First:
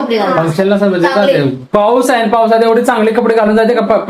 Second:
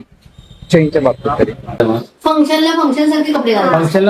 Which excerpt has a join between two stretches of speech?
second; 1 cut; at 1.8 s

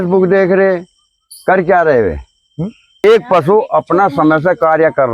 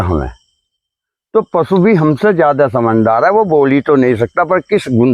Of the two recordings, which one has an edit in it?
first; 1 cut; at 3.0 s

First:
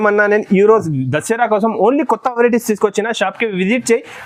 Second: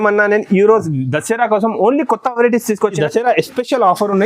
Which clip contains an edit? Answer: second; 1 cut; at 3.0 s

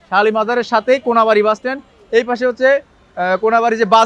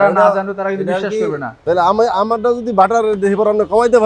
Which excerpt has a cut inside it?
second; 1 cut; at 1.5 s

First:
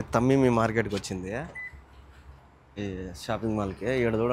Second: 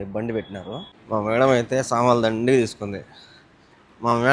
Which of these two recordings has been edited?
second; 1 cut; at 0.9 s

